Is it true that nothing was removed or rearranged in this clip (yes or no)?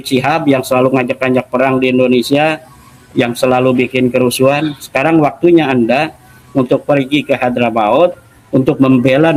yes